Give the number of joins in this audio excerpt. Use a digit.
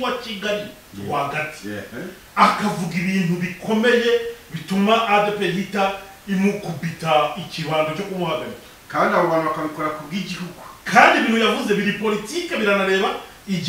0